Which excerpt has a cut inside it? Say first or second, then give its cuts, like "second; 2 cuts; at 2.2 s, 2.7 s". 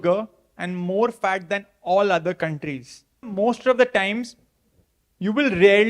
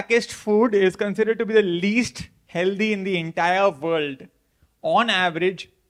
first; 1 cut; at 3.3 s